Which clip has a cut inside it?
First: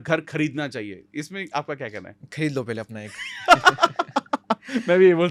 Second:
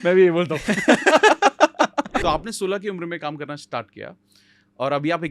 second; 1 cut; at 2.2 s

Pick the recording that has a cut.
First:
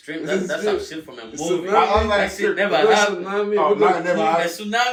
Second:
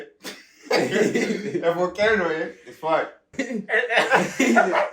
second; 1 cut; at 3.3 s

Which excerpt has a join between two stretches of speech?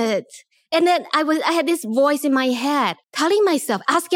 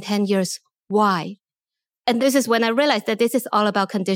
first; 1 cut; at 3.0 s

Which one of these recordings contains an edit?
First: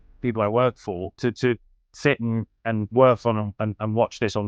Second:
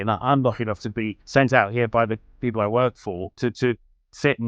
second; 1 cut; at 1.2 s

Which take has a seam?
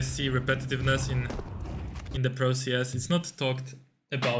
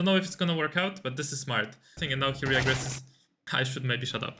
second; 2 cuts; at 2.0 s, 3.3 s

